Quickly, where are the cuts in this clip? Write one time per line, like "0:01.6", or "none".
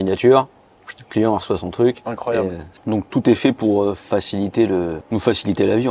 0:02.7
0:05.0

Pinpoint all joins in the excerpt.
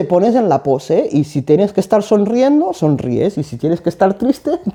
none

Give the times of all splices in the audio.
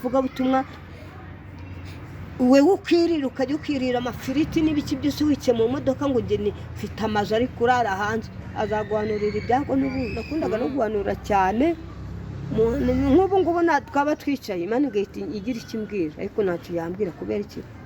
0:10.2

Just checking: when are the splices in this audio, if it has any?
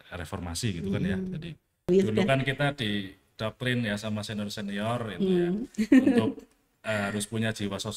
0:01.9

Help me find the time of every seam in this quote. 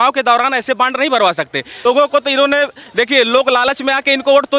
0:01.8

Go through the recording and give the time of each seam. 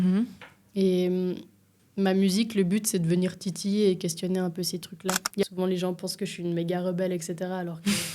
0:05.4

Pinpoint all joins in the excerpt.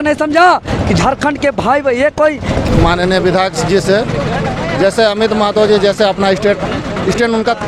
0:02.6

